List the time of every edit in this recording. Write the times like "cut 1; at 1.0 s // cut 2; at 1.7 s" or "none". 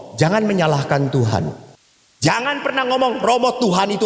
cut 1; at 1.6 s